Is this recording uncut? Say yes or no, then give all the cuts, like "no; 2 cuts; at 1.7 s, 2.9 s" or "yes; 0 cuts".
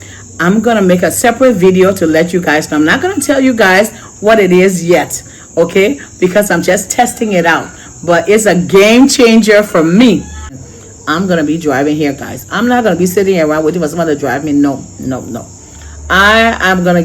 no; 1 cut; at 10.5 s